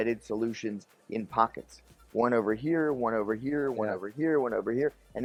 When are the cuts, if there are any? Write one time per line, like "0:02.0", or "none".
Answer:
none